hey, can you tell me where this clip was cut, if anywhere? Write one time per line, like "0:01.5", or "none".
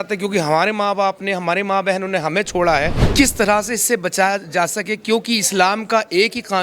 0:03.0